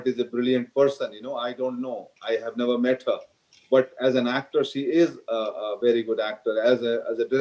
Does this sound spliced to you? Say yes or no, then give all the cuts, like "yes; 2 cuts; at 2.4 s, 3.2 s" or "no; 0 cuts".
no; 0 cuts